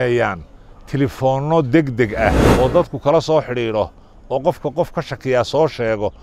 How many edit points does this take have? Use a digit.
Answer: 1